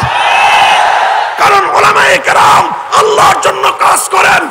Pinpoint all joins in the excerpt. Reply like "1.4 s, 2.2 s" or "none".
none